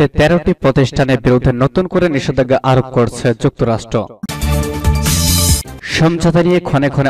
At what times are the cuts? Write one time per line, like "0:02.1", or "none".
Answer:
0:04.3